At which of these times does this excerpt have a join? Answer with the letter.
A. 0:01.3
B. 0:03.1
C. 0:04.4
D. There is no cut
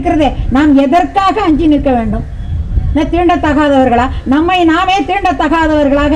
D